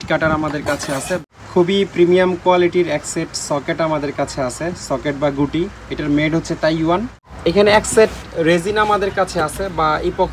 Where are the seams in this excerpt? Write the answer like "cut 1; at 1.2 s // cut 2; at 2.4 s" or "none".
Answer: cut 1; at 1.2 s // cut 2; at 7.2 s